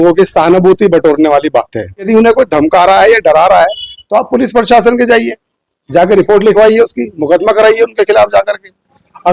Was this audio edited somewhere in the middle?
yes; 1 cut; at 2.1 s

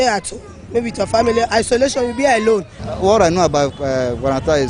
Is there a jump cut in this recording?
yes; 1 cut; at 2.8 s

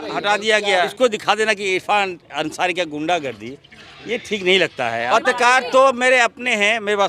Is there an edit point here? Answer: yes; 2 cuts; at 0.9 s, 5.1 s

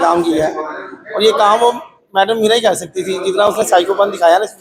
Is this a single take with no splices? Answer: yes; 0 cuts

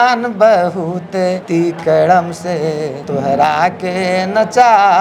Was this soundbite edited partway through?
yes; 2 cuts; at 1.4 s, 3.0 s

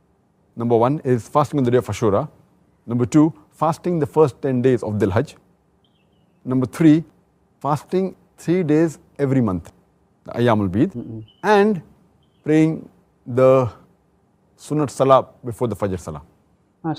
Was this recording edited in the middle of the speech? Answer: no; 0 cuts

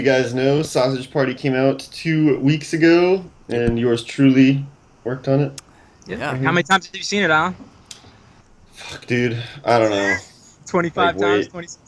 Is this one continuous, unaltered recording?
yes; 0 cuts

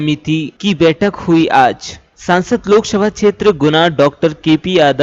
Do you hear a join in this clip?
no; 0 cuts

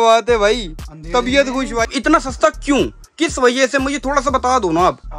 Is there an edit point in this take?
yes; 1 cut; at 1.9 s

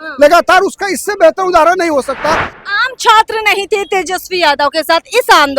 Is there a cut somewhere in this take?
yes; 1 cut; at 2.5 s

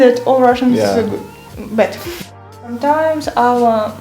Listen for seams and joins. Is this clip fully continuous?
no; 1 cut; at 2.3 s

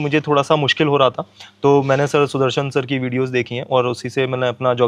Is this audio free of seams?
yes; 0 cuts

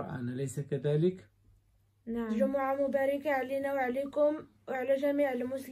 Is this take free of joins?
no; 1 cut; at 2.4 s

